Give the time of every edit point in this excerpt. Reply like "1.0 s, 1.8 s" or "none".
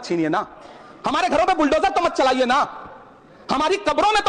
none